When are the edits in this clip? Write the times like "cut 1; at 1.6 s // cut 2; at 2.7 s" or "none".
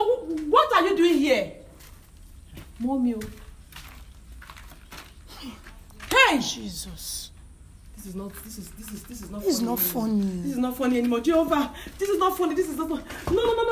none